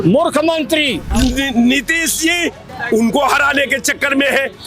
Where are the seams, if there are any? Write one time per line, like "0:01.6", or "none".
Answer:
0:01.0
0:02.7